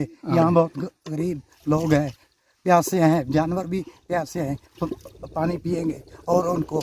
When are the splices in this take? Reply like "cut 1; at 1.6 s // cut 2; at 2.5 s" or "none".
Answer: none